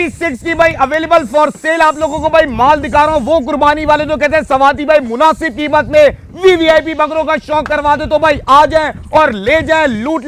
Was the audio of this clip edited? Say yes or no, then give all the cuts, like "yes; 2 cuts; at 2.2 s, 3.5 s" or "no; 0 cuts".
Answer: no; 0 cuts